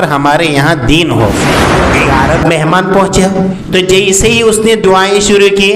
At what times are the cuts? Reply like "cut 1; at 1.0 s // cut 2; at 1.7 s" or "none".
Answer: cut 1; at 1.8 s // cut 2; at 3.6 s